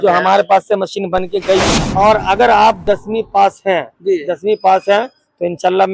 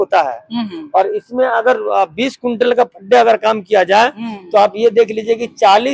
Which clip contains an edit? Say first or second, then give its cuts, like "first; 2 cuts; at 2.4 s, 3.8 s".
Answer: first; 1 cut; at 1.8 s